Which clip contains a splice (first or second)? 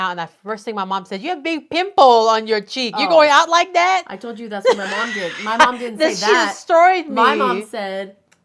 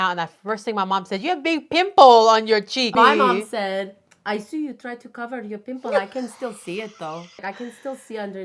second